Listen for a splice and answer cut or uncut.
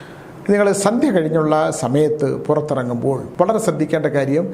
cut